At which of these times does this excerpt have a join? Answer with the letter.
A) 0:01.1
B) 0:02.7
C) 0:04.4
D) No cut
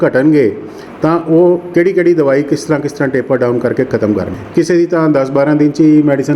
C